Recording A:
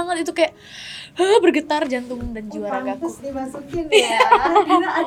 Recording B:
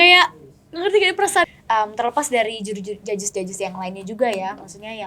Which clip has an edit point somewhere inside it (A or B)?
B